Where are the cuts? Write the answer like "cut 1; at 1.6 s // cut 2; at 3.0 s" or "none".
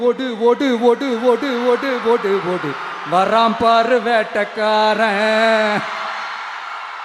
none

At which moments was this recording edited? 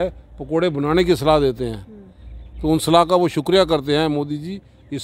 none

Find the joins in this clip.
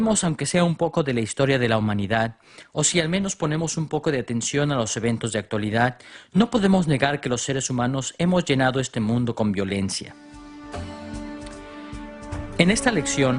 none

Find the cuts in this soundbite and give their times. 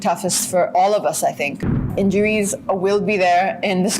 cut 1; at 1.8 s

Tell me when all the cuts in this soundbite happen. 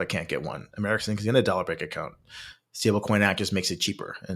none

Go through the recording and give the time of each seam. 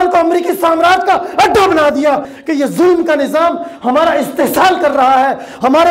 cut 1; at 2.3 s

